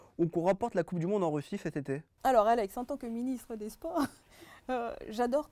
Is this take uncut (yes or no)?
no